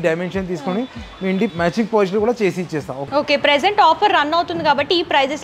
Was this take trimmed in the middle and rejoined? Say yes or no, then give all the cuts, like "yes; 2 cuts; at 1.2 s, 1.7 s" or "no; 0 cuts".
yes; 2 cuts; at 1.5 s, 2.9 s